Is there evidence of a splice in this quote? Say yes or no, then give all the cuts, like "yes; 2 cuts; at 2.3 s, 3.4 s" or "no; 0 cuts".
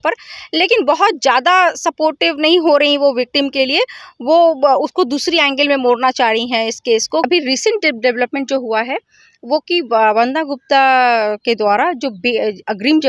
yes; 1 cut; at 7.2 s